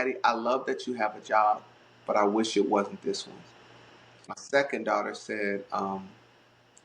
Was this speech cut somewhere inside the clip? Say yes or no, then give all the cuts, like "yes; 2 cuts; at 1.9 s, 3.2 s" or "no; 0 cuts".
yes; 1 cut; at 4.2 s